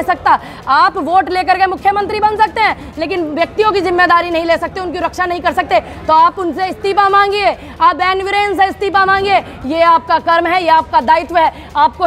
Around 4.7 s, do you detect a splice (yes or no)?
no